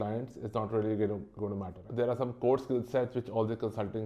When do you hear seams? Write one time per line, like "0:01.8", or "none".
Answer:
0:01.7